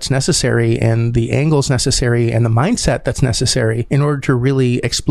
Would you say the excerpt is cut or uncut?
cut